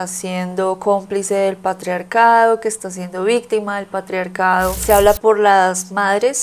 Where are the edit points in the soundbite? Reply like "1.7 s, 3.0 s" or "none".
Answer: 4.7 s